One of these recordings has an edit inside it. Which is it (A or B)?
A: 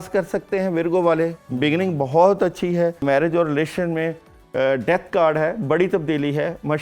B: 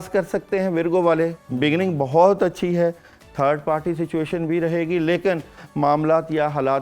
A